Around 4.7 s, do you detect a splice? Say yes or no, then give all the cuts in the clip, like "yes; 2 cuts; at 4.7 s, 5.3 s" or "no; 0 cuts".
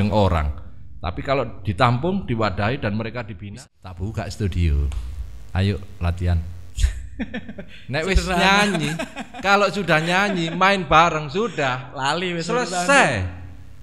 no; 1 cut; at 3.3 s